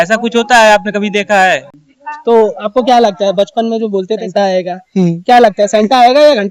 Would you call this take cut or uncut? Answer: cut